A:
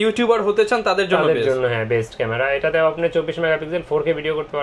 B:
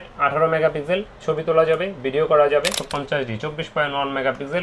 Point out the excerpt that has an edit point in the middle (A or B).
B